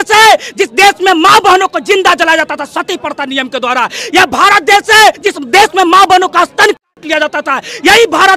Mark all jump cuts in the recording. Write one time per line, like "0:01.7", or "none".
0:05.2